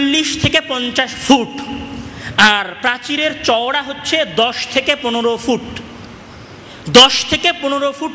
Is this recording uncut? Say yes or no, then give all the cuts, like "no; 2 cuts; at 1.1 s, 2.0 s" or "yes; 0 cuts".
yes; 0 cuts